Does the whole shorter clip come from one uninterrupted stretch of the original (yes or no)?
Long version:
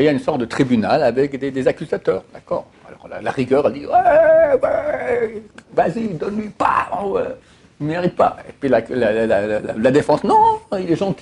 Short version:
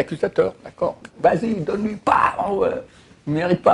no